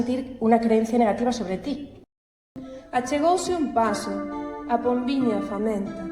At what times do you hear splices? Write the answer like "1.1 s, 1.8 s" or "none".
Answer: 2.4 s